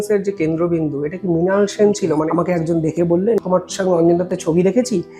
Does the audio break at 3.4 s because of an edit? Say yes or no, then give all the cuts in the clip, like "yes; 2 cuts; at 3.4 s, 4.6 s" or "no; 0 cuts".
yes; 2 cuts; at 2.3 s, 3.4 s